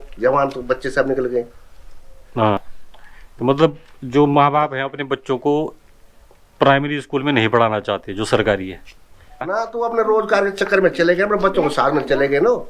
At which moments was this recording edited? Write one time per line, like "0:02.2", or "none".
0:02.6
0:09.5